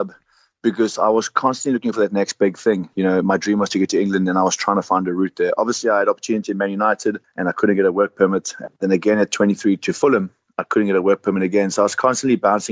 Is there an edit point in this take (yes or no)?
no